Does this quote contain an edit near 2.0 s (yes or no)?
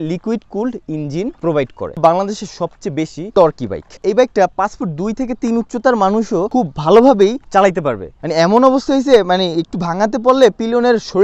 yes